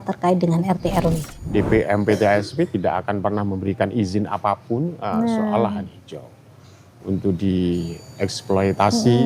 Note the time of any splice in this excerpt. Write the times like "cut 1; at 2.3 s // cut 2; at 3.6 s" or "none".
cut 1; at 1.2 s